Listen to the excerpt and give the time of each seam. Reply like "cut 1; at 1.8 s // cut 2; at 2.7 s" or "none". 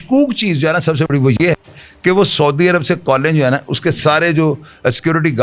none